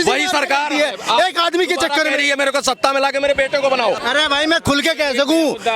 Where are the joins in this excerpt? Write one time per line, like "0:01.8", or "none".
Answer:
0:04.0